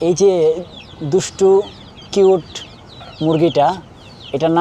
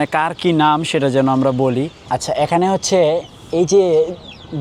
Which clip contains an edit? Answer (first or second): second